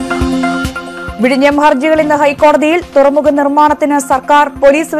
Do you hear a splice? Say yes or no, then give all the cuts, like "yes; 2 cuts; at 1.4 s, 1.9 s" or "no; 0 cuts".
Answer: yes; 1 cut; at 1.0 s